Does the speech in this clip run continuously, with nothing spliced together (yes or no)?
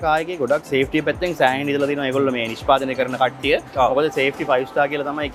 yes